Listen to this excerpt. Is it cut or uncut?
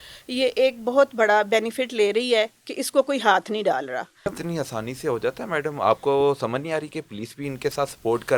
cut